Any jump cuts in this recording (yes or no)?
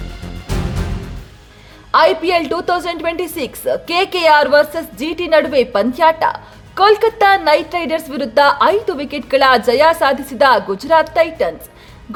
no